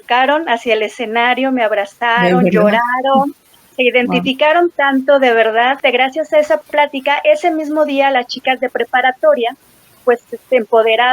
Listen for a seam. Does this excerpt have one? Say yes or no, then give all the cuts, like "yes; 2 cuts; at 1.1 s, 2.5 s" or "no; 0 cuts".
yes; 2 cuts; at 5.8 s, 6.7 s